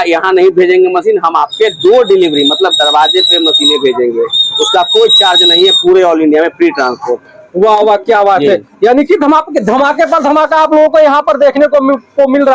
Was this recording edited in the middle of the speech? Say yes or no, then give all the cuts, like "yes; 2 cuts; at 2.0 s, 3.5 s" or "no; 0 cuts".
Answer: no; 0 cuts